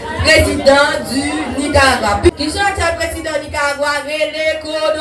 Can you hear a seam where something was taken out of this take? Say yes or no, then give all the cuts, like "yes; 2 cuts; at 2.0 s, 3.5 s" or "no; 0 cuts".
yes; 1 cut; at 2.3 s